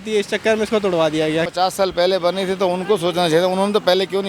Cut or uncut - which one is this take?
cut